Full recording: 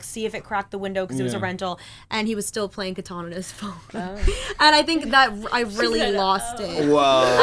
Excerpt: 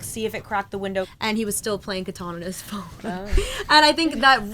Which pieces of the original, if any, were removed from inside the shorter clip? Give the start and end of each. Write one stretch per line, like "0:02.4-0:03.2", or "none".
0:01.1-0:02.0